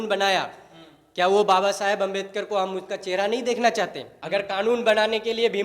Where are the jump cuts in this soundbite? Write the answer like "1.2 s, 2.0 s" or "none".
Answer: 4.6 s